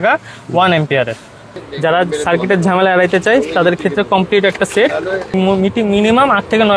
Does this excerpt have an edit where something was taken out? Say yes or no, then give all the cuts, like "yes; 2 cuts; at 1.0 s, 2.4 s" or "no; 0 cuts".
yes; 2 cuts; at 1.5 s, 5.3 s